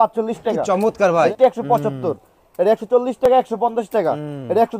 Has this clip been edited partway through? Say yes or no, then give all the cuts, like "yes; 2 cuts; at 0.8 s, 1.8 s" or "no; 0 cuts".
yes; 1 cut; at 1.3 s